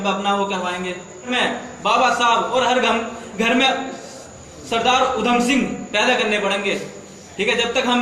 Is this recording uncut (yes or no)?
no